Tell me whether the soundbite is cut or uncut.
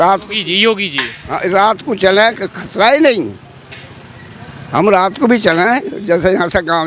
uncut